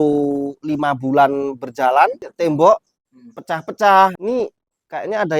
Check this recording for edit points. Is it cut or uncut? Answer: cut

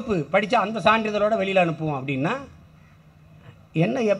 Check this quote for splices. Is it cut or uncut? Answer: uncut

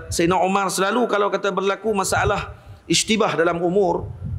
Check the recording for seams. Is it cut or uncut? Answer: uncut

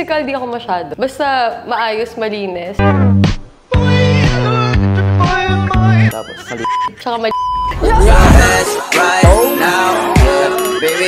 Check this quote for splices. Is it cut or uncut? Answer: uncut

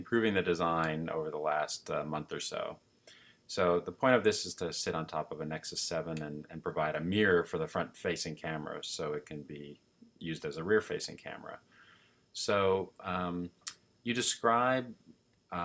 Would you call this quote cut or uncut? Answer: cut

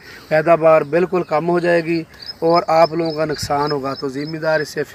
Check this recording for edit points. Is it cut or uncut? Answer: uncut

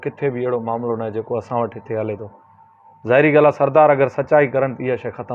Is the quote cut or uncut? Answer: uncut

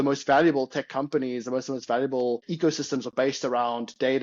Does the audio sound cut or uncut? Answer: cut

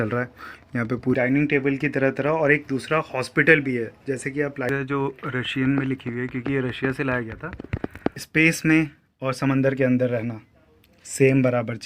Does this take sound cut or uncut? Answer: cut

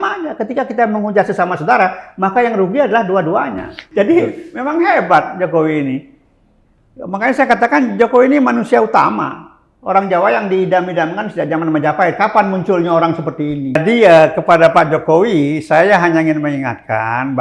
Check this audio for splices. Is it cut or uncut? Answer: cut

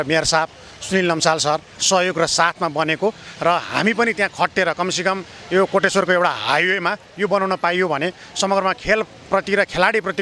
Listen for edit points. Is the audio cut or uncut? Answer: cut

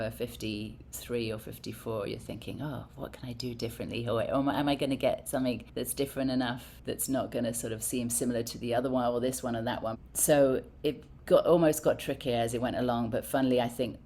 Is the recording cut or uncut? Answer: cut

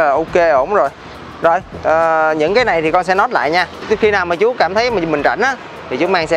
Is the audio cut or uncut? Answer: uncut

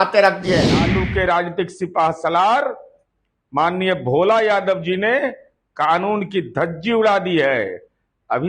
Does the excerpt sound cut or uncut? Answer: cut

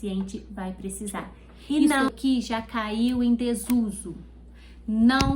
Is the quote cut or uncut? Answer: cut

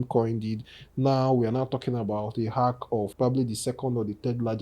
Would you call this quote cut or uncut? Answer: cut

